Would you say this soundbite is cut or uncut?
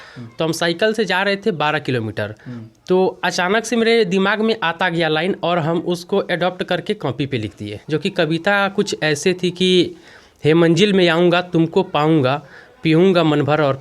uncut